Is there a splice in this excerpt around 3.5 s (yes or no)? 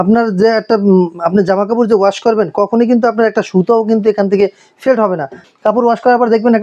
no